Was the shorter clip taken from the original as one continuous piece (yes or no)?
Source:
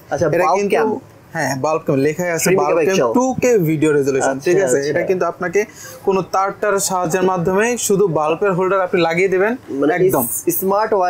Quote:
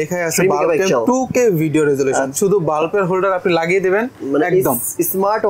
no